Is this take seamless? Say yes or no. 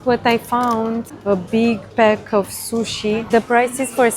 no